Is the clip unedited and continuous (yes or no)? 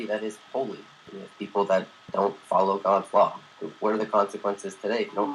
no